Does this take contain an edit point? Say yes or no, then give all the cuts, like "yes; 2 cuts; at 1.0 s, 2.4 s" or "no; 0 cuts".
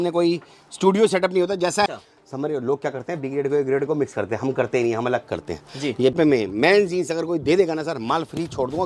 yes; 2 cuts; at 1.9 s, 6.1 s